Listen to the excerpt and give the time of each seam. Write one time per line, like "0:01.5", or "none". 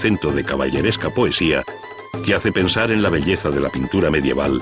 none